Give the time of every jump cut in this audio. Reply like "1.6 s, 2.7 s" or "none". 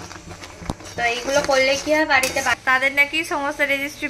2.6 s